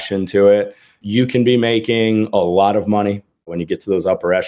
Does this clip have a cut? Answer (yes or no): yes